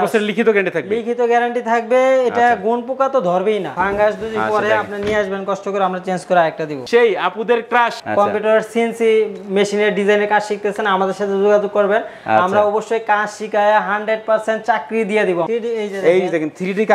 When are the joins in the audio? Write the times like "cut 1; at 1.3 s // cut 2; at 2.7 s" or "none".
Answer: cut 1; at 3.7 s // cut 2; at 6.8 s // cut 3; at 8.0 s // cut 4; at 15.5 s

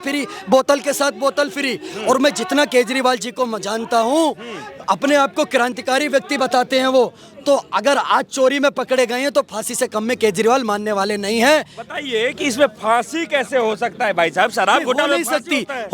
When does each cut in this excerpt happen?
none

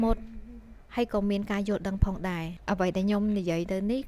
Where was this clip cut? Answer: cut 1; at 2.5 s

